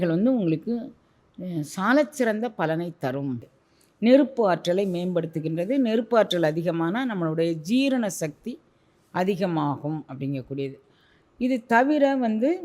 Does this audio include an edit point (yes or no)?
yes